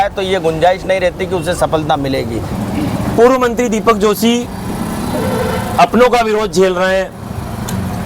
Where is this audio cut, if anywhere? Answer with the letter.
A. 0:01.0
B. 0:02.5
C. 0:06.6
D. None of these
B